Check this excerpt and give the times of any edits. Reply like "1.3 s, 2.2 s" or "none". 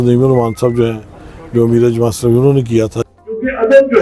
3.0 s